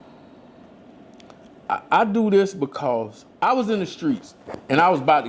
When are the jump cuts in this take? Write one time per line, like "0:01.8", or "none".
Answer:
0:03.2